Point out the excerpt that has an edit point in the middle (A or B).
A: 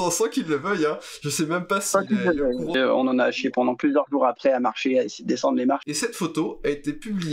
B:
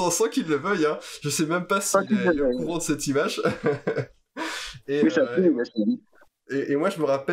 A